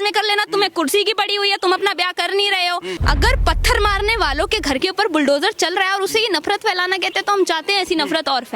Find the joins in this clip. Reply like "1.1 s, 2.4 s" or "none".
2.9 s

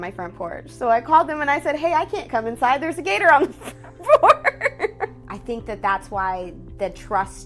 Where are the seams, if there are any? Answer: 5.3 s

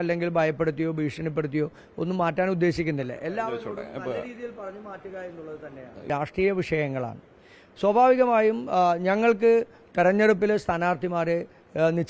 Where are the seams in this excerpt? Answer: 6.1 s

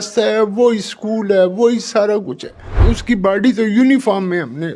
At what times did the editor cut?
2.8 s

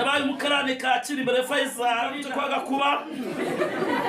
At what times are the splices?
2.2 s

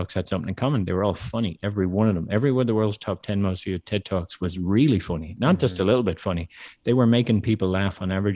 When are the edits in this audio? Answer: none

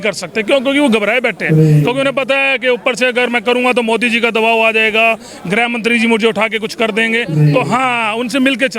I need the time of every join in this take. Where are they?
none

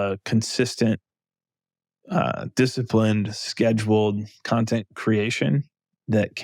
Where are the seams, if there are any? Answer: none

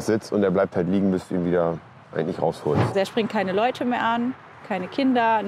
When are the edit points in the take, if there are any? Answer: 2.9 s

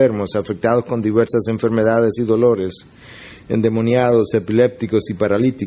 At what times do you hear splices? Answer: none

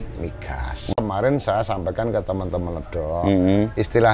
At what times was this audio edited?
0.9 s

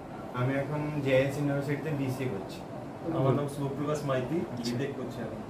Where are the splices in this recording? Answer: 3.0 s, 4.5 s

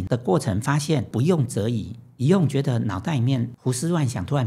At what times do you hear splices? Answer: 1.1 s, 3.5 s

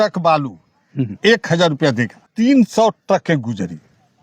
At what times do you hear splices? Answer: 2.2 s

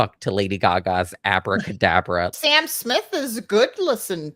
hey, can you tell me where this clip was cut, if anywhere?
2.3 s

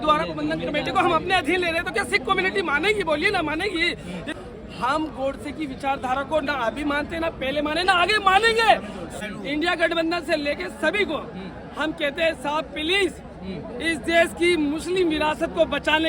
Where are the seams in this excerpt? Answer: 4.3 s, 9.1 s

